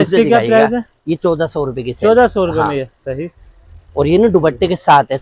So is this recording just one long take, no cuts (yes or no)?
yes